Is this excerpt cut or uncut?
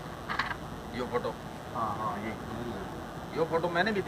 uncut